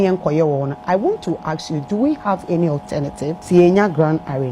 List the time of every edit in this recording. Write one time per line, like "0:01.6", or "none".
0:03.4